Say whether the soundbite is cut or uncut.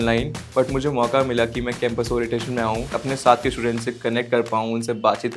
uncut